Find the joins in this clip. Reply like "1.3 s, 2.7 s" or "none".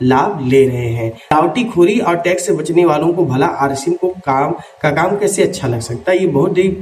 1.3 s

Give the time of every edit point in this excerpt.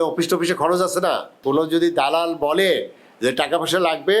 1.4 s

